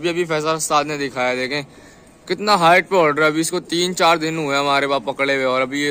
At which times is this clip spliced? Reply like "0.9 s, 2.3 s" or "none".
none